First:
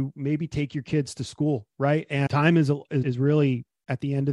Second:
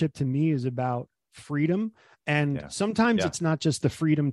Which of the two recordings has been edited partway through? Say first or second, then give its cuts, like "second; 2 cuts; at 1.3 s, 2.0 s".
first; 2 cuts; at 2.3 s, 3.0 s